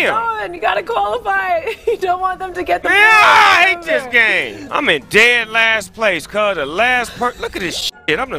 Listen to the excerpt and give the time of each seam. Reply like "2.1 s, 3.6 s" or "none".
4.7 s